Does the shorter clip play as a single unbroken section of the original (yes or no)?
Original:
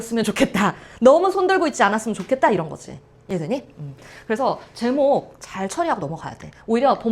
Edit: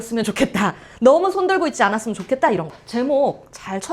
no